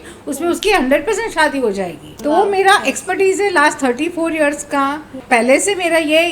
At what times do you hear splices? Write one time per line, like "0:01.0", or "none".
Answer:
0:02.0
0:05.2